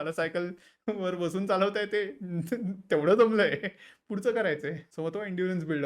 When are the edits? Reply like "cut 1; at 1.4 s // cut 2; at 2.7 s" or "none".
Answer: cut 1; at 4.9 s

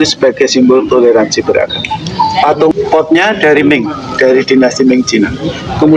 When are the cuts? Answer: cut 1; at 2.7 s

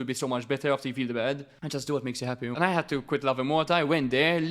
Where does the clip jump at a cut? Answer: cut 1; at 1.5 s // cut 2; at 2.5 s

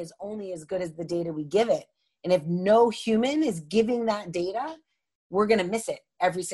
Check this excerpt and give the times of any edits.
none

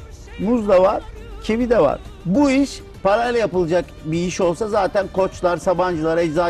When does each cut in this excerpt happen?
cut 1; at 2.1 s

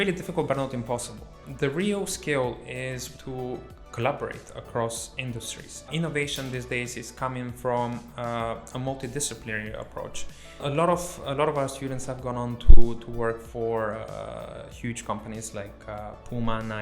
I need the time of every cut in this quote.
cut 1; at 1.4 s // cut 2; at 3.0 s // cut 3; at 5.9 s // cut 4; at 10.6 s

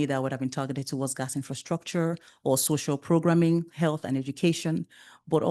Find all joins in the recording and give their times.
none

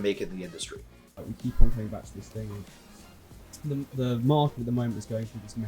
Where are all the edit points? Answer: cut 1; at 1.1 s

